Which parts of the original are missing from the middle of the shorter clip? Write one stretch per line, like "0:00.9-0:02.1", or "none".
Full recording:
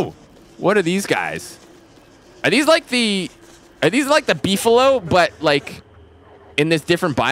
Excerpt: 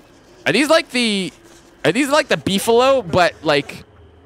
none